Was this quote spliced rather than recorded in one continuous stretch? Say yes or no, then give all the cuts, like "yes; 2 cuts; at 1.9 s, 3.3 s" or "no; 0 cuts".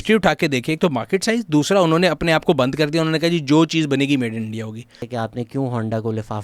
yes; 1 cut; at 5.0 s